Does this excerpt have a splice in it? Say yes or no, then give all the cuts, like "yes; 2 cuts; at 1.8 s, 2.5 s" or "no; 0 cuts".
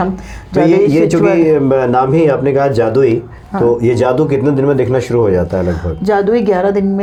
no; 0 cuts